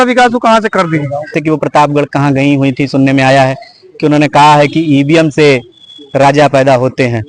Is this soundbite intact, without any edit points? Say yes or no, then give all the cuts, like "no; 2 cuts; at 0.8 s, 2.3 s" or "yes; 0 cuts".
no; 1 cut; at 1.4 s